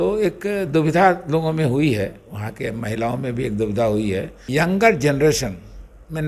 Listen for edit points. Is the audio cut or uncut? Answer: cut